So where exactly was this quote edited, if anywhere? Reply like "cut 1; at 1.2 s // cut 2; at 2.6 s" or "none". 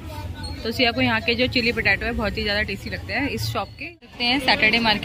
cut 1; at 4.2 s